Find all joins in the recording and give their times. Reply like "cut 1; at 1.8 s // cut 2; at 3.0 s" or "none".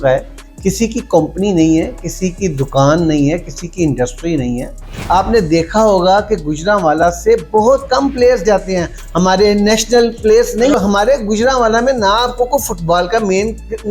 cut 1; at 4.9 s // cut 2; at 10.7 s